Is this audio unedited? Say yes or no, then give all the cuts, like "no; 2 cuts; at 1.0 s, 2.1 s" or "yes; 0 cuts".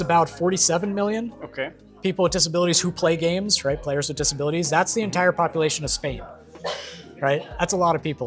yes; 0 cuts